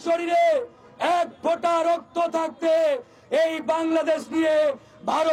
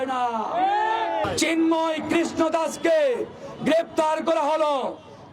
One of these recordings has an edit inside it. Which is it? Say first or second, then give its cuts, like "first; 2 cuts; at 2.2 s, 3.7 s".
second; 1 cut; at 1.3 s